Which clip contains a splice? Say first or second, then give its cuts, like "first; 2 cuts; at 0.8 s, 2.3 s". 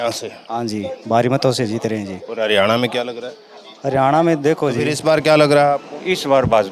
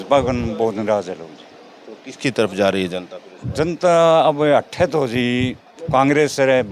first; 1 cut; at 4.9 s